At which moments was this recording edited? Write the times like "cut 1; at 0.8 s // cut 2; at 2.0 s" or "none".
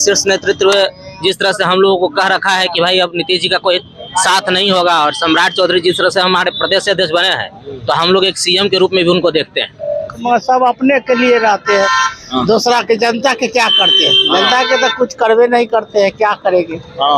cut 1; at 10.2 s

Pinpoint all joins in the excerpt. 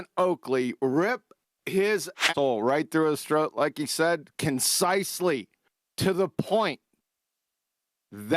cut 1; at 2.3 s

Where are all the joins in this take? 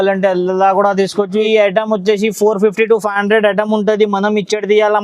cut 1; at 1.4 s

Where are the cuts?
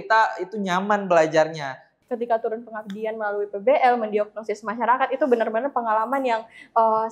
cut 1; at 1.9 s

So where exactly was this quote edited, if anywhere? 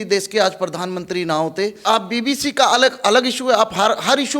cut 1; at 1.8 s

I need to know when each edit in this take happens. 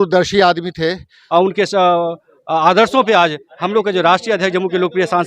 cut 1; at 1.1 s

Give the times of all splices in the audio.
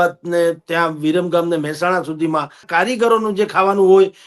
cut 1; at 2.6 s

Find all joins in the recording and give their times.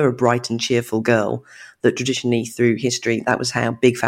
none

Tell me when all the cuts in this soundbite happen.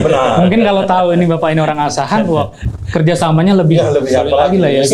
none

